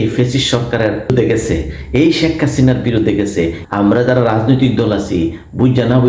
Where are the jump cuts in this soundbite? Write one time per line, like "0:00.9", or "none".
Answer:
0:01.1
0:03.6